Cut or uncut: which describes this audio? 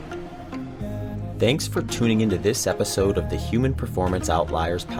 uncut